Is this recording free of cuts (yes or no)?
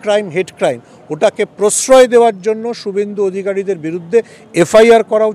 yes